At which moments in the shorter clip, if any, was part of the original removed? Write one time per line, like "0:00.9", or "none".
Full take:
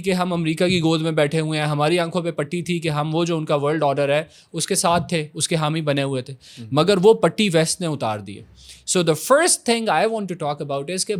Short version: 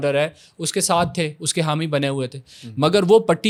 none